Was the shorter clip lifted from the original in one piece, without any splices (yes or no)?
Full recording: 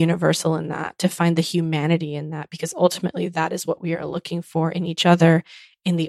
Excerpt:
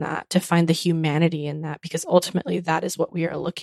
yes